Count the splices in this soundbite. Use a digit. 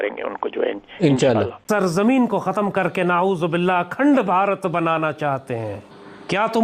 1